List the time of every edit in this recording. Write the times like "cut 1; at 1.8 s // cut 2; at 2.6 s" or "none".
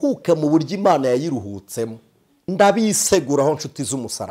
cut 1; at 2.4 s

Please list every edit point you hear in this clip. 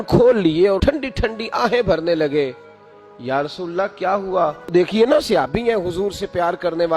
cut 1; at 4.7 s

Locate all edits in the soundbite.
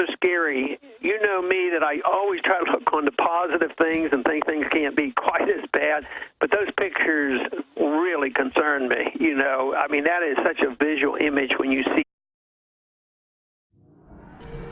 none

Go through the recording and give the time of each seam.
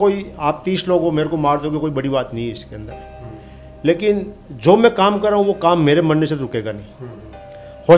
none

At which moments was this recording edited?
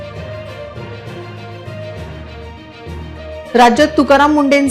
cut 1; at 1.3 s

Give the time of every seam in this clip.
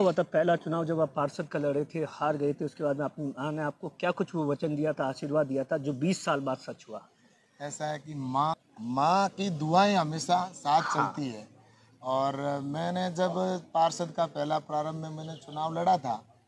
cut 1; at 8.6 s

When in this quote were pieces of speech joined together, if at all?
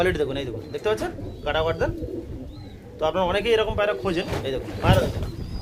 none

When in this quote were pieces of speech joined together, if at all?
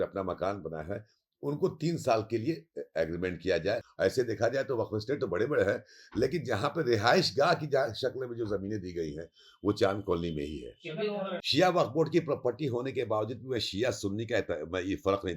cut 1; at 3.9 s // cut 2; at 11.4 s

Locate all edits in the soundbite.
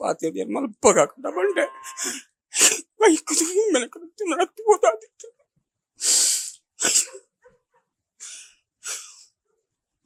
none

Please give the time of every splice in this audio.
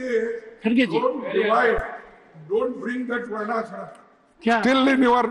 none

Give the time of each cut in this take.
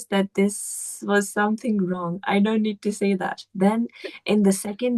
none

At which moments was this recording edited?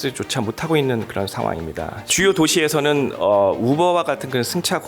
cut 1; at 2.1 s

